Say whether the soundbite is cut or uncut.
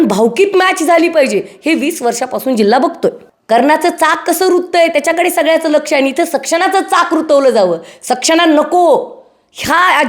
cut